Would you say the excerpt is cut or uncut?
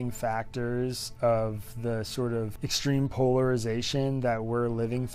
cut